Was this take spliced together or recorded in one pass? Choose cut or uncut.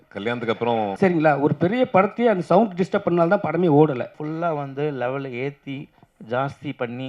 cut